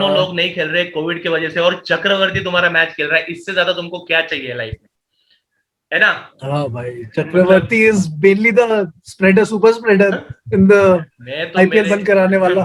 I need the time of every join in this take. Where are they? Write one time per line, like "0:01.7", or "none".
none